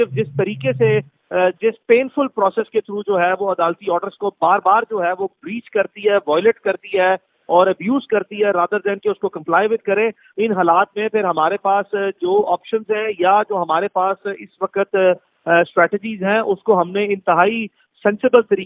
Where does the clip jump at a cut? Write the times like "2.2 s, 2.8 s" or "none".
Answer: none